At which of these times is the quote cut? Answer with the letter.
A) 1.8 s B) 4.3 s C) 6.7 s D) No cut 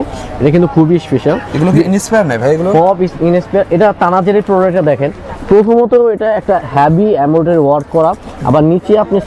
D